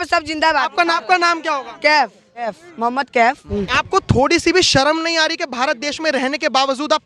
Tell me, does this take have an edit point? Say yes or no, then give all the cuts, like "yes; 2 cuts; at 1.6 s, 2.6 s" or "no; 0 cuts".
yes; 3 cuts; at 0.9 s, 2.5 s, 3.4 s